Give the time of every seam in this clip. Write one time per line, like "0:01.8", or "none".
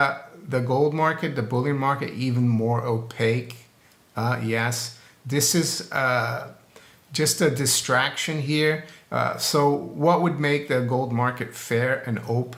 none